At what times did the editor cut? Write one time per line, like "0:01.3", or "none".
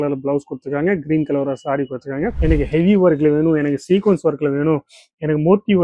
0:02.4